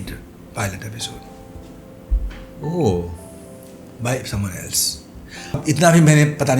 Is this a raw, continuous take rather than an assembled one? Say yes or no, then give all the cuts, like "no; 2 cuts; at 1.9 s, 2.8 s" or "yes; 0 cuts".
no; 1 cut; at 5.6 s